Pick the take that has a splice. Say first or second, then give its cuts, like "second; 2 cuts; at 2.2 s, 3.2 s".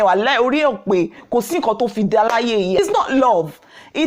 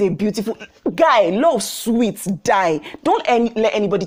first; 1 cut; at 2.8 s